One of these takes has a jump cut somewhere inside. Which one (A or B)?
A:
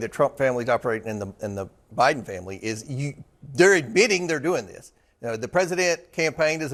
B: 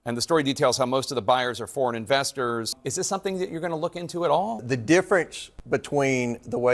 B